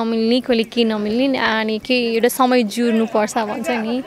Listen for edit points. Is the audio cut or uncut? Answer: uncut